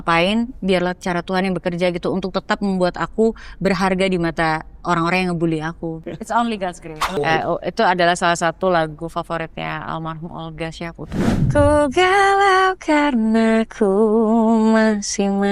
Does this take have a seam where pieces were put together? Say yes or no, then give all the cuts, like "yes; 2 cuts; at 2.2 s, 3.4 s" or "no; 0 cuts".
yes; 3 cuts; at 6.0 s, 7.2 s, 11.3 s